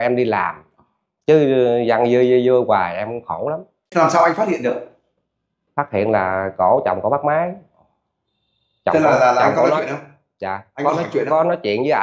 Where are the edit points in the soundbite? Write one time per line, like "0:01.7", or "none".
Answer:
0:03.8